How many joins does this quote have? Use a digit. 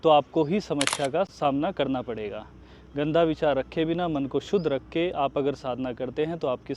1